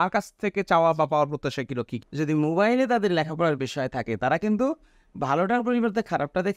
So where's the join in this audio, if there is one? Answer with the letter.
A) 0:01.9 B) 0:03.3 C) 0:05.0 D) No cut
A